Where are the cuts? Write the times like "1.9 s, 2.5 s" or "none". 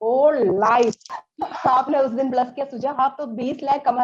1.2 s